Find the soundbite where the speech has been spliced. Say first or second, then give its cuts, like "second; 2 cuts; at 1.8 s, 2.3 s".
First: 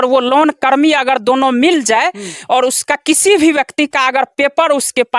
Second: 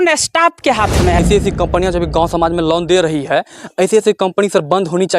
second; 1 cut; at 1.2 s